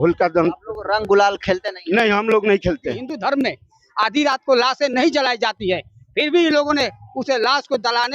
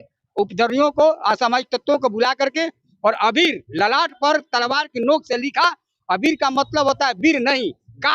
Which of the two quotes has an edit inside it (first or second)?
first